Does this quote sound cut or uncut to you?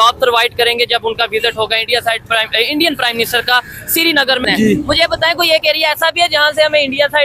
cut